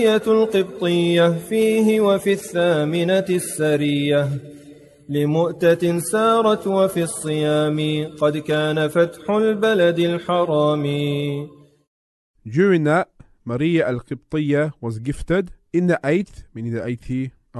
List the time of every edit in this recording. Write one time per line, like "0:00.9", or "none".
none